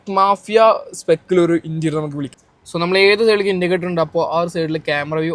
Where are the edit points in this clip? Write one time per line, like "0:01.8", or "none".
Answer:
0:02.2